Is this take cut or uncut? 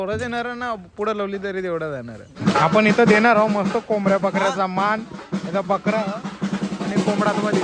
cut